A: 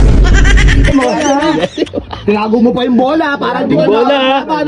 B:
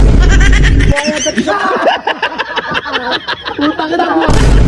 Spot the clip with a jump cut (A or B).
A